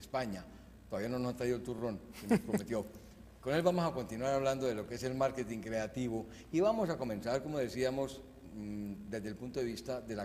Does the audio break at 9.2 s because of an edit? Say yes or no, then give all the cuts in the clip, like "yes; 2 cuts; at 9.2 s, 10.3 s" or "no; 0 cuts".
no; 1 cut; at 2.1 s